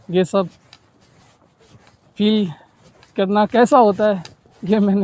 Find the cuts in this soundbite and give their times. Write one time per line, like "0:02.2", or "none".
none